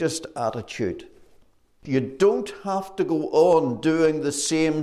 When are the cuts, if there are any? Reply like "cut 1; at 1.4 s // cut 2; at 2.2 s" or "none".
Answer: cut 1; at 1.7 s